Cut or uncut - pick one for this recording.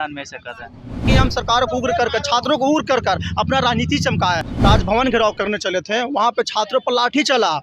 cut